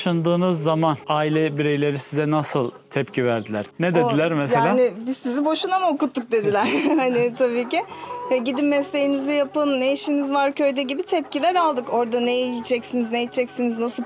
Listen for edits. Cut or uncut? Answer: cut